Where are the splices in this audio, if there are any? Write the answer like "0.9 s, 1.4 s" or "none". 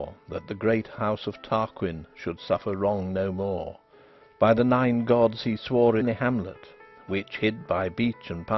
none